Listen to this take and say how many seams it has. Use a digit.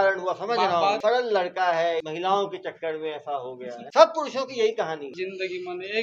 4